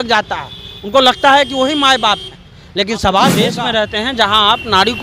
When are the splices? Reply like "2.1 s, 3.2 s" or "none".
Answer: 3.5 s

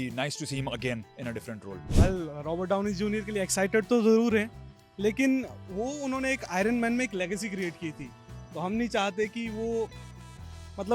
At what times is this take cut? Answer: 1.8 s

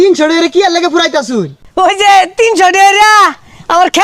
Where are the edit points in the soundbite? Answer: 1.4 s

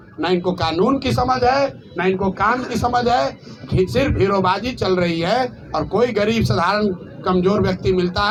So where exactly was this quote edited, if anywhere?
none

